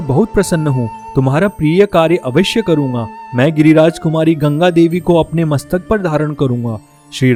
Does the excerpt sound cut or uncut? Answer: uncut